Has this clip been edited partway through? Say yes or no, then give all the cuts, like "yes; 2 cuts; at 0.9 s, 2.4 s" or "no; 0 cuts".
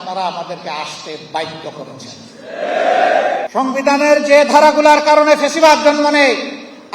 yes; 1 cut; at 3.5 s